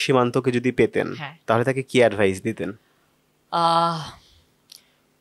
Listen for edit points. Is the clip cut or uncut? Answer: uncut